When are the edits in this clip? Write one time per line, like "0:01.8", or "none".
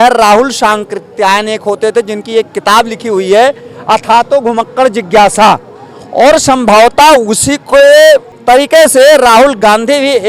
0:08.3